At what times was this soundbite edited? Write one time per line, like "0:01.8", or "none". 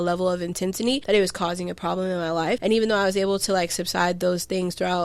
0:01.0
0:02.6